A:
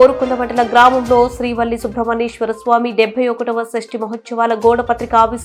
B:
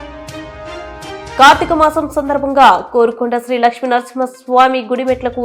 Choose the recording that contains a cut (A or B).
B